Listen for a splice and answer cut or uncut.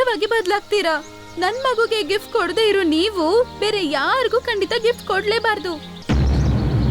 cut